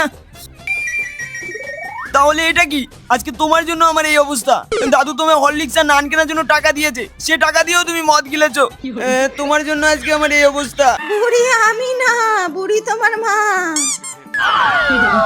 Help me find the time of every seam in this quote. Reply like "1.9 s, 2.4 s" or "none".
11.0 s